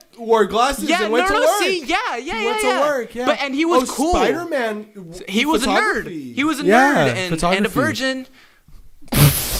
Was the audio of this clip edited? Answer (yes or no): no